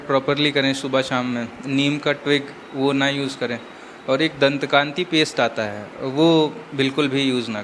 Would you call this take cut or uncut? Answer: uncut